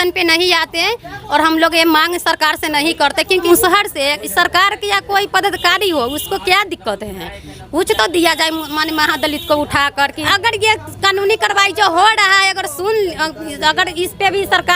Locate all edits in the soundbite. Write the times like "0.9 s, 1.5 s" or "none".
3.4 s, 10.2 s